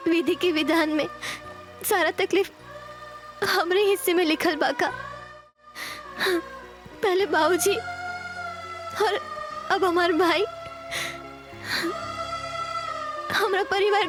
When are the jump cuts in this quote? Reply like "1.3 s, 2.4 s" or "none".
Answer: none